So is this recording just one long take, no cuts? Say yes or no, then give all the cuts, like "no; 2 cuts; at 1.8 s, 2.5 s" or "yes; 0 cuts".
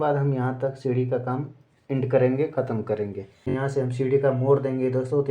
no; 1 cut; at 3.5 s